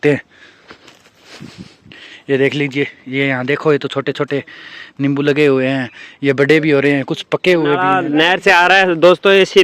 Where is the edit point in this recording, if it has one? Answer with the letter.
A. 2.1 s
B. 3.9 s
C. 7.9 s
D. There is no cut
C